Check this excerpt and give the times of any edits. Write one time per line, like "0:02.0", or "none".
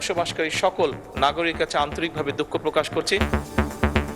0:03.3